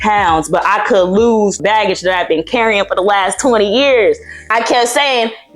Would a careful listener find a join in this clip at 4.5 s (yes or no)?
yes